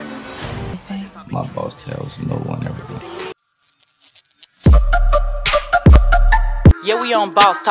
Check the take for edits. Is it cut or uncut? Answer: cut